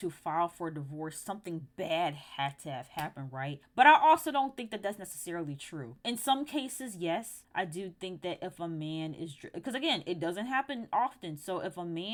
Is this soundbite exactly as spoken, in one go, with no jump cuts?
yes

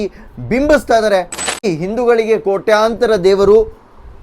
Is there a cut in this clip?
yes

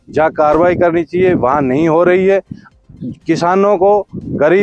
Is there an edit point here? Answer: no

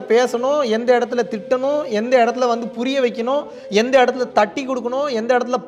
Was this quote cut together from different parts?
no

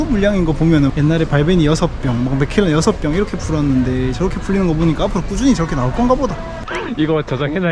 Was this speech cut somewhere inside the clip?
yes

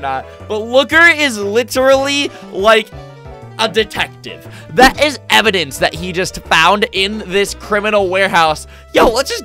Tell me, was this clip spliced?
no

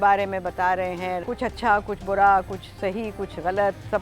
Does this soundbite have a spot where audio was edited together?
yes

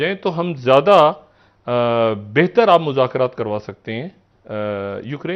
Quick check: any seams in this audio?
no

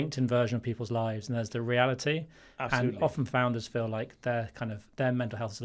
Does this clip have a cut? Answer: no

